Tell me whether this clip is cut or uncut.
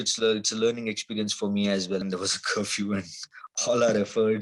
cut